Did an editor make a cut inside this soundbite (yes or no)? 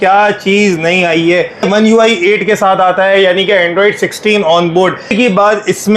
yes